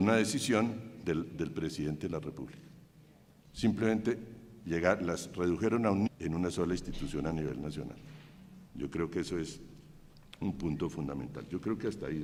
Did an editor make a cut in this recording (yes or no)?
no